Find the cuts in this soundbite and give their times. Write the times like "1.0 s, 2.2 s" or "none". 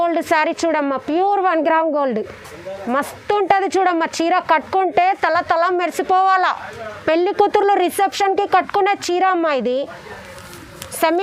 none